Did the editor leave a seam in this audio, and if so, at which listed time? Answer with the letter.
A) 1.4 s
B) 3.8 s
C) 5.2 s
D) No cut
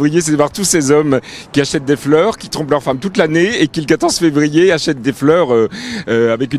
D